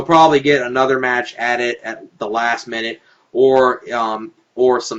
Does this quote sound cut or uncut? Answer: cut